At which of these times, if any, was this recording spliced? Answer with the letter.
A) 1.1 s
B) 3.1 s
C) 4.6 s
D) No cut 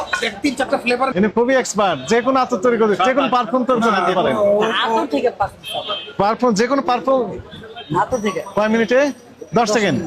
A